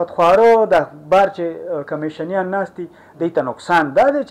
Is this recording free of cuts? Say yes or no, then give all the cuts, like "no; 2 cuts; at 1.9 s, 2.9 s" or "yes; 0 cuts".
yes; 0 cuts